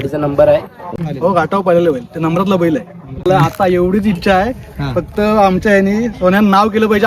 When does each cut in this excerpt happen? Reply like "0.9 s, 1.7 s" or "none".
1.0 s, 3.3 s

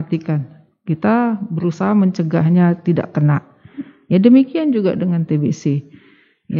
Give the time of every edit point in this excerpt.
none

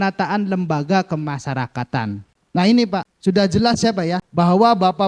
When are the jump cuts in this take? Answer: 2.3 s, 3.1 s, 4.2 s

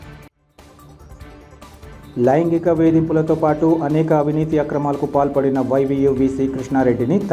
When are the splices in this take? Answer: 1.9 s

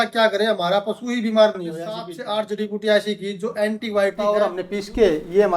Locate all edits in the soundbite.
2.1 s, 4.5 s

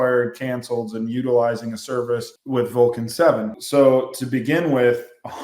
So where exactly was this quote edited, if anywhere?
2.3 s, 3.5 s

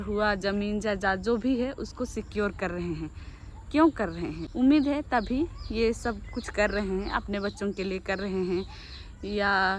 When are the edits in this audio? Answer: 4.4 s

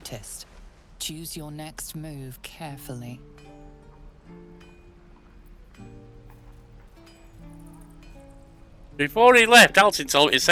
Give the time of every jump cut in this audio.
none

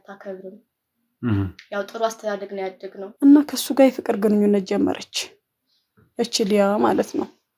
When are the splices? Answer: 3.0 s

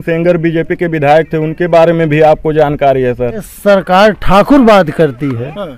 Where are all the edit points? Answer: 3.5 s

